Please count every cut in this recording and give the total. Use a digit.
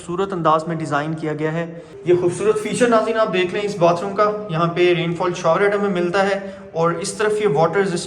1